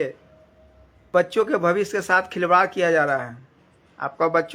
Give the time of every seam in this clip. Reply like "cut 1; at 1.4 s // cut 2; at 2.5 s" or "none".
cut 1; at 1.1 s